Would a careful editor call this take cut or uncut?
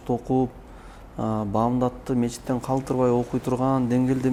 uncut